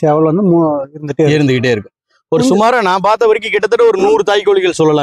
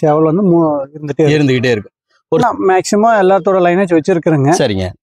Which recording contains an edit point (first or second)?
second